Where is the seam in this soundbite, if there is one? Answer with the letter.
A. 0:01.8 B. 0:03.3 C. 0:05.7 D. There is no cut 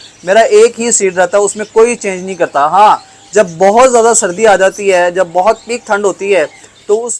D